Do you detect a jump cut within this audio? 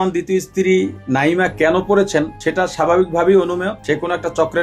yes; 2 cuts; at 2.4 s, 3.8 s

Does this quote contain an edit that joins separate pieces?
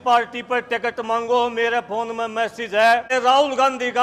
yes; 1 cut; at 3.1 s

